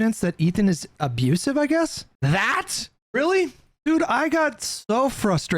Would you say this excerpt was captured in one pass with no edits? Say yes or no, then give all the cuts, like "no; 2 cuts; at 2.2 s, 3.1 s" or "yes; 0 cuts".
no; 2 cuts; at 2.1 s, 3.8 s